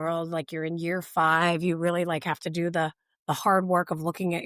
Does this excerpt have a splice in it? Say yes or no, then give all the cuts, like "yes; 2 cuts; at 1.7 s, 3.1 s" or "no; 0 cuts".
no; 0 cuts